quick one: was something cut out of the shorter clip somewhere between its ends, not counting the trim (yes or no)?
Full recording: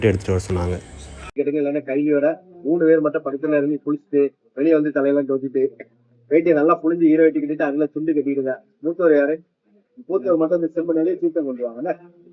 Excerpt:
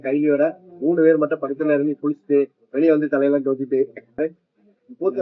yes